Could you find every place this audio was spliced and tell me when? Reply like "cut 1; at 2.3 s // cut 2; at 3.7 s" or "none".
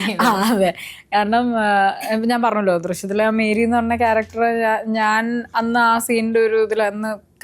none